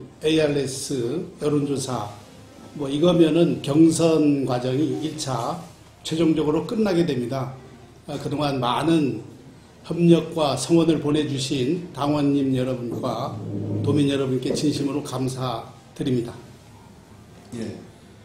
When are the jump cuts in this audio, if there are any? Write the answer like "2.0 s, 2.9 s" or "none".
none